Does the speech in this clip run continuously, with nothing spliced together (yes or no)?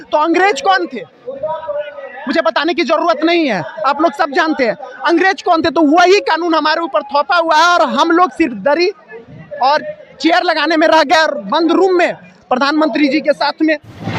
yes